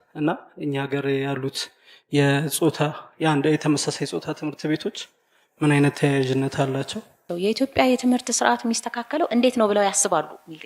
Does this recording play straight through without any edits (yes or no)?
no